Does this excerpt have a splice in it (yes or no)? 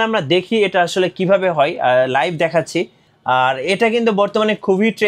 no